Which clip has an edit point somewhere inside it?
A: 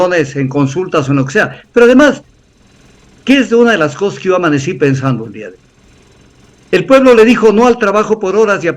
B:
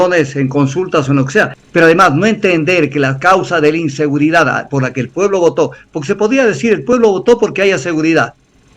B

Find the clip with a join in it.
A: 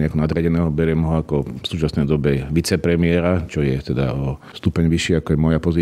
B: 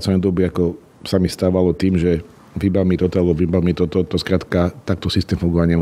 A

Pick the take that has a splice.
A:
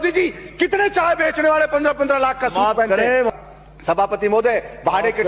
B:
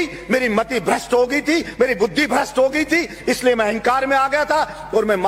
A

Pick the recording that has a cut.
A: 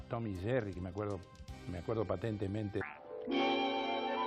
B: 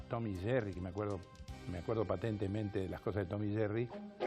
B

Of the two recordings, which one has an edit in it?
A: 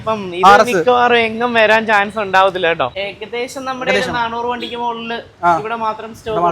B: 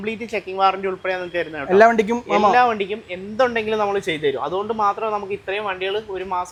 A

